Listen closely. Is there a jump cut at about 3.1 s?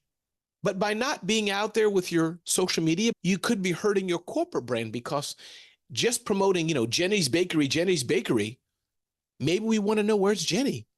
yes; 1 cut; at 3.1 s

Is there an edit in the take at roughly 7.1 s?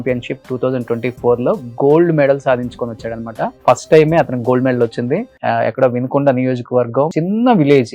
yes; 3 cuts; at 3.5 s, 5.3 s, 7.1 s

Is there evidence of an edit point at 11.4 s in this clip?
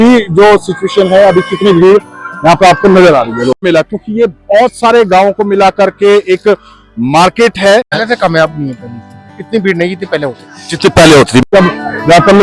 yes; 3 cuts; at 3.6 s, 8.0 s, 11.4 s

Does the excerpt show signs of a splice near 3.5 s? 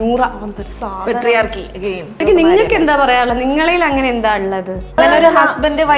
no; 2 cuts; at 2.2 s, 5.0 s

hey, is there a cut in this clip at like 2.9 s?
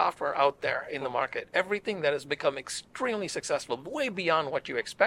no; 0 cuts

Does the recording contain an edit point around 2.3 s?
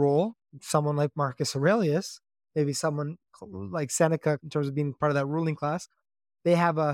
no; 1 cut; at 4.4 s

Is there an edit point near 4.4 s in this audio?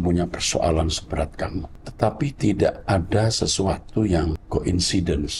yes; 2 cuts; at 1.8 s, 4.4 s

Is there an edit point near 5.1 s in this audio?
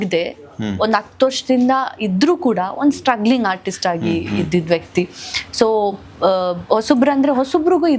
no; 0 cuts

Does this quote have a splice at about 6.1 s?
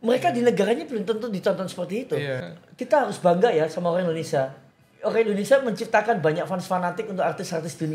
no; 1 cut; at 2.4 s

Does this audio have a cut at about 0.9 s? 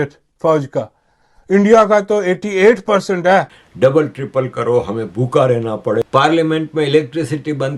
no; 2 cuts; at 3.6 s, 6.1 s

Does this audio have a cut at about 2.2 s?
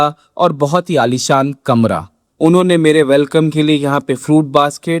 yes; 1 cut; at 2.2 s

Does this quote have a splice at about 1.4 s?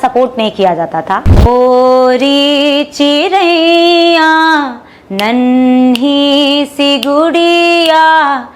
yes; 1 cut; at 1.4 s

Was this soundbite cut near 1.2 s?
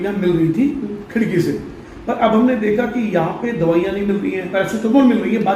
no; 1 cut; at 4.5 s

